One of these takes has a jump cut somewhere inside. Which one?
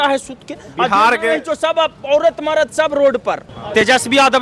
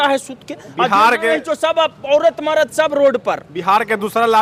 first; 1 cut; at 3.5 s

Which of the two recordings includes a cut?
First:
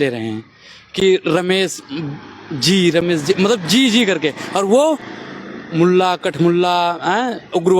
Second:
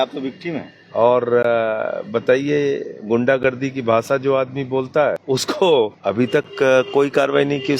second; 2 cuts; at 5.2 s, 6.0 s

